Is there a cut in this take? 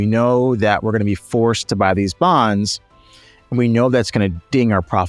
no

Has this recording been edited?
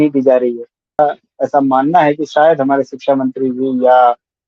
yes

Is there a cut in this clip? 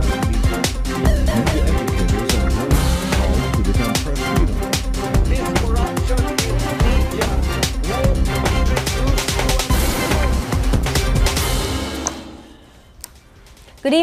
no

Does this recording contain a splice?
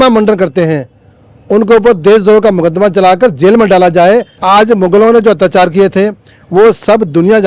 yes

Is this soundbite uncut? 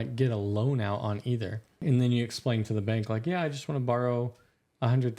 no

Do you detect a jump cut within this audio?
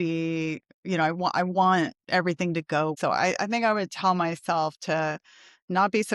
yes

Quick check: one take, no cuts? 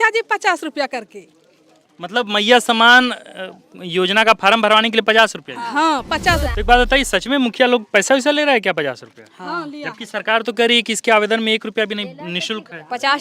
no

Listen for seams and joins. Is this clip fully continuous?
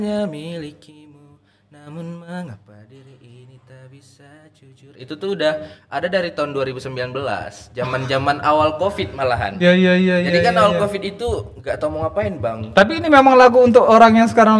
yes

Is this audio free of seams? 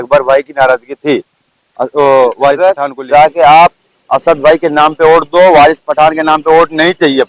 no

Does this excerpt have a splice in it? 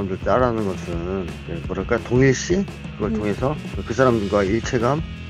no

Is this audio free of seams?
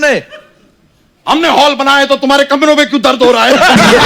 yes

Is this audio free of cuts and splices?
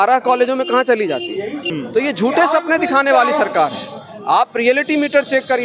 no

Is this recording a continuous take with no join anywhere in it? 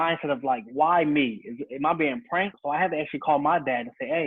no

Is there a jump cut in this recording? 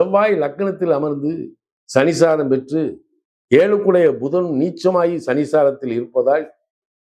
no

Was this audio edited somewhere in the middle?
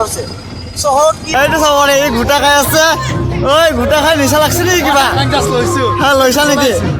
yes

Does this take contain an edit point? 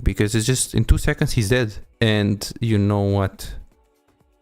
yes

